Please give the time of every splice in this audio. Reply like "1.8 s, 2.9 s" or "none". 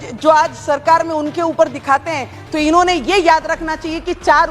none